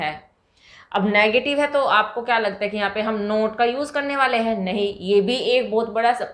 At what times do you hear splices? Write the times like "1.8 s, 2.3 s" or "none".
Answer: none